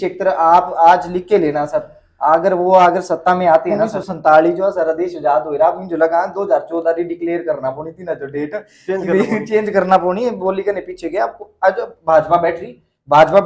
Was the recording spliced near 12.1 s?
no; 1 cut; at 4.0 s

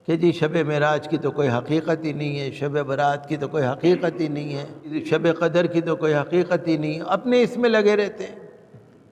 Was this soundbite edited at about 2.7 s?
no; 1 cut; at 5.0 s

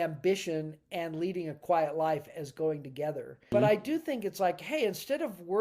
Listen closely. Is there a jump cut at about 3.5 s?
yes; 1 cut; at 3.5 s

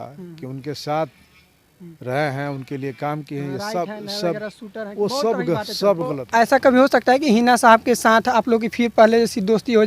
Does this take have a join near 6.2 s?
yes; 1 cut; at 6.2 s

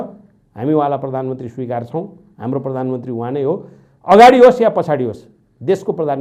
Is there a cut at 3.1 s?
no; 0 cuts

